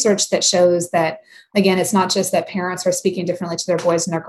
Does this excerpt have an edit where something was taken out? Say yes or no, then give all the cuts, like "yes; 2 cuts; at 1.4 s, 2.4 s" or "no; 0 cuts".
yes; 1 cut; at 1.5 s